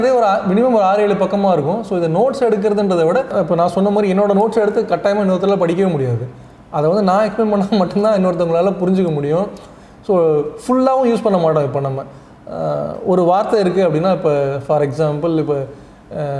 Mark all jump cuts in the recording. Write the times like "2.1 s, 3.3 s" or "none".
3.3 s